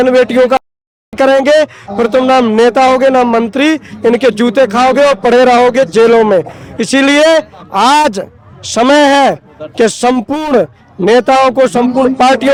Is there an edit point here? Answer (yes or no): no